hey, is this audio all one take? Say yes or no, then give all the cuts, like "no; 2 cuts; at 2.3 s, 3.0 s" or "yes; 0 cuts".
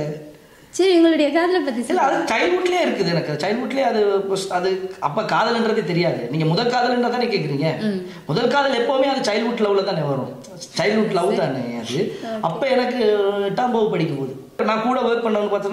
no; 1 cut; at 14.6 s